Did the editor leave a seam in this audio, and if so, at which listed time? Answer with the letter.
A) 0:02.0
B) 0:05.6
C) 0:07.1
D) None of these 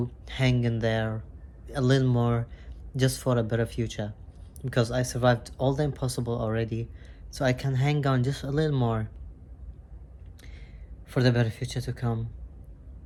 D